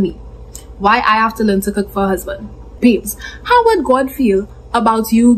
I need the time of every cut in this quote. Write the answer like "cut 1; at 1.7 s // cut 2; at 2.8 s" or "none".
cut 1; at 2.8 s